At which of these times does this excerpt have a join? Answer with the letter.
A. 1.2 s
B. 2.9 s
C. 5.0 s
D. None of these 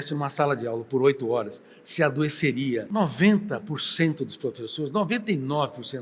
B